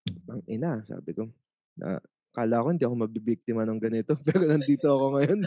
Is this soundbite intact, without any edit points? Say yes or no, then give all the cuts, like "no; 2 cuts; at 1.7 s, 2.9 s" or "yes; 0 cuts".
yes; 0 cuts